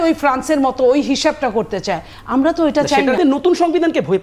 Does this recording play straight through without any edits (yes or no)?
no